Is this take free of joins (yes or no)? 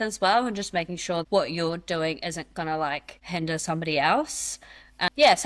no